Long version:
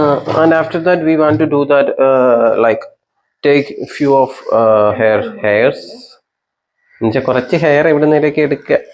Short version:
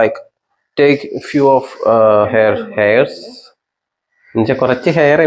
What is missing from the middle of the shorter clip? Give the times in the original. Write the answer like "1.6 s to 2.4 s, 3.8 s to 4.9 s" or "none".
none